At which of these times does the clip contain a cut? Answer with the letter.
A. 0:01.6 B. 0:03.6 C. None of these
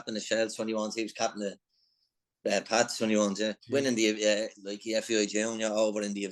B